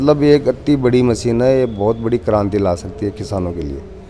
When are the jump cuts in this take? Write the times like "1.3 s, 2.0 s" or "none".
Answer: none